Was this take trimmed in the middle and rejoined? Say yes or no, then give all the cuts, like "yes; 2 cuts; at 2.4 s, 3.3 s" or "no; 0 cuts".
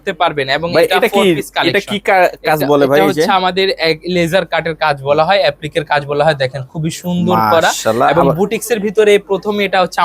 no; 0 cuts